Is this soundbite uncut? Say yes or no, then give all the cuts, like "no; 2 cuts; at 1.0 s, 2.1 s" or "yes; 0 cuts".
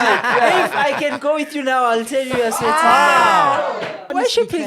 no; 1 cut; at 3.6 s